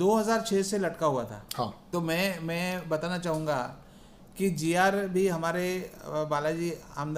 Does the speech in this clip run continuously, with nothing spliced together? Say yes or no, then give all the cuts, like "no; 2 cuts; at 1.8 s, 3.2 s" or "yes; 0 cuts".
no; 1 cut; at 1.8 s